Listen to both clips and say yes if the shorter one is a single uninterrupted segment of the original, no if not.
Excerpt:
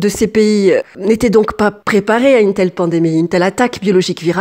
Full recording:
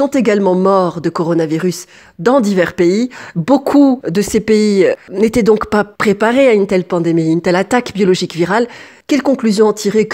yes